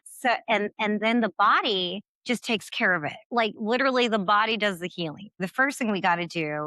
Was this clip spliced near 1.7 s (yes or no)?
no